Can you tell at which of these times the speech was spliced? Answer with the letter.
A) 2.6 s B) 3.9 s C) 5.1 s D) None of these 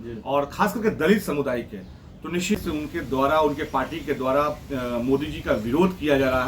A